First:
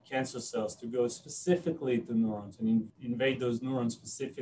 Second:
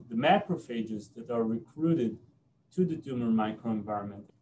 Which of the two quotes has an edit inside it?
first; 1 cut; at 2.9 s

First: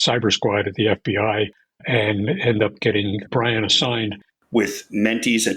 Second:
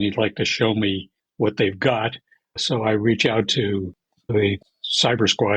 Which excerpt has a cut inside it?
first; 1 cut; at 4.3 s

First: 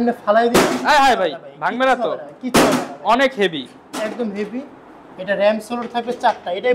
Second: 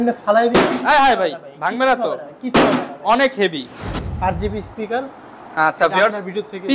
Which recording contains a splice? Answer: second; 1 cut; at 3.8 s

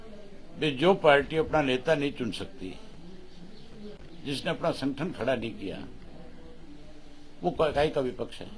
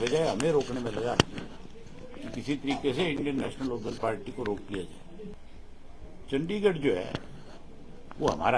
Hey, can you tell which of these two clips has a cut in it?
second; 1 cut; at 5.4 s

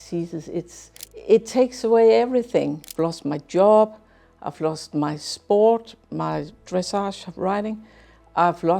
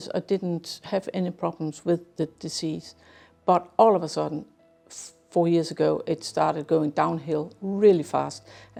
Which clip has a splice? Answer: first; 2 cuts; at 1.1 s, 2.8 s

